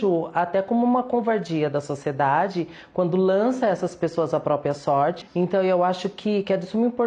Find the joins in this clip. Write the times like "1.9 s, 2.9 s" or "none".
5.2 s